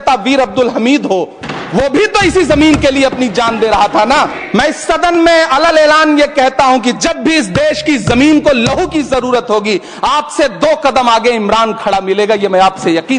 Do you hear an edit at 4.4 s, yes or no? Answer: yes